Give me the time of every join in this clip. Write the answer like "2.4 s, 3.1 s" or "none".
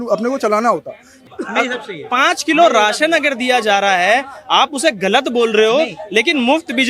1.2 s